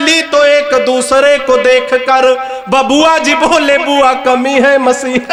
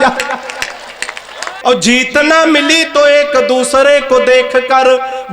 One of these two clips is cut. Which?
second; 1 cut; at 1.4 s

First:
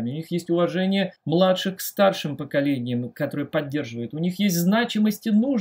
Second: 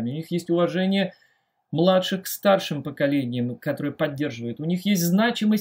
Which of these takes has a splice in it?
first; 1 cut; at 1.2 s

